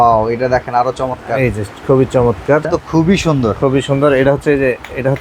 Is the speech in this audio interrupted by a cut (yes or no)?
yes